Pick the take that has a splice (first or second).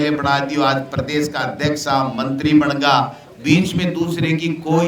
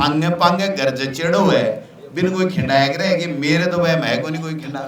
first